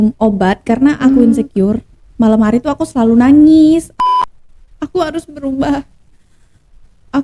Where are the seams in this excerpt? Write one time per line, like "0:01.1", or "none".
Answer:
0:04.0